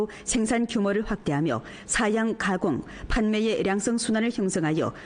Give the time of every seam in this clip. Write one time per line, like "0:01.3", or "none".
0:01.5